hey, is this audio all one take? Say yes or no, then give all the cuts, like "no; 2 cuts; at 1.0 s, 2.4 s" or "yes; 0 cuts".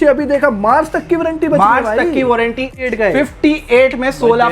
no; 1 cut; at 2.8 s